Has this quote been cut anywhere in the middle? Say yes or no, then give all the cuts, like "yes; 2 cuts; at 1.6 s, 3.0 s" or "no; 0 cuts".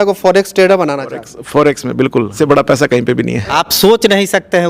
yes; 2 cuts; at 2.4 s, 3.5 s